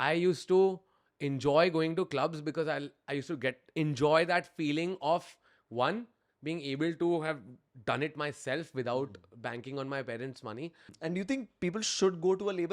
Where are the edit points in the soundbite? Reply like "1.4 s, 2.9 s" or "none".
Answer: 10.9 s